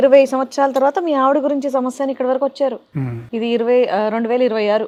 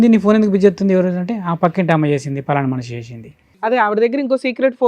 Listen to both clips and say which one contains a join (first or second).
second